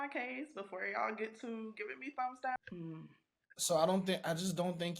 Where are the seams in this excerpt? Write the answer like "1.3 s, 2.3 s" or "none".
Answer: 2.6 s